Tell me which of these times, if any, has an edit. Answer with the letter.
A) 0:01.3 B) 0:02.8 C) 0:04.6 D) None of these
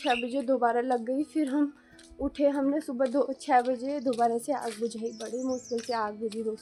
D